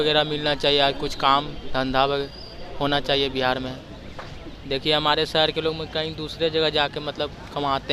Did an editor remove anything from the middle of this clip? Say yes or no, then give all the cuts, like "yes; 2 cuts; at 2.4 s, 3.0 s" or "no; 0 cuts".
no; 0 cuts